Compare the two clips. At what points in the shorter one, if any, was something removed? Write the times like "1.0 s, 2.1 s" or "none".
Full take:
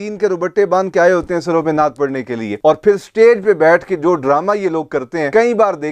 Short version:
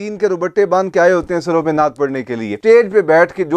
2.5 s